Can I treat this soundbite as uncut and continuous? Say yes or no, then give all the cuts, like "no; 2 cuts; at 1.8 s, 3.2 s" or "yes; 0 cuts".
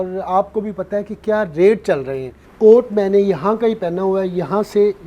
no; 1 cut; at 2.4 s